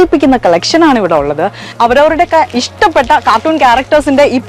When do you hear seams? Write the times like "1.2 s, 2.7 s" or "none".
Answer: 1.7 s